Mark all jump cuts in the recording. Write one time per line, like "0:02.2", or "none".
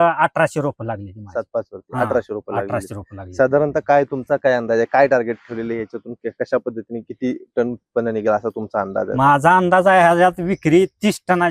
none